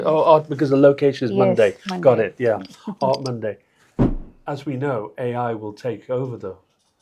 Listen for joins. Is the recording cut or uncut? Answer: cut